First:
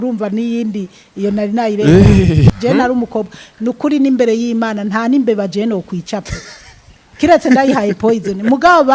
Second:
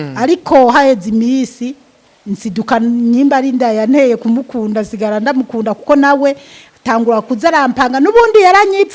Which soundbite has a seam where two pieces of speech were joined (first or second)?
first